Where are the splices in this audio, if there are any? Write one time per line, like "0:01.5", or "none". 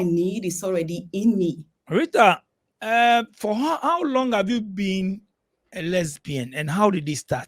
0:01.7